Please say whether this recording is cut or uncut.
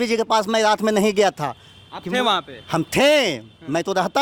uncut